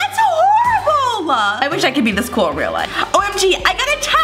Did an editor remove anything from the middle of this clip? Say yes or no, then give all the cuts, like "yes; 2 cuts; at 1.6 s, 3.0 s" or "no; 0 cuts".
yes; 2 cuts; at 1.6 s, 2.9 s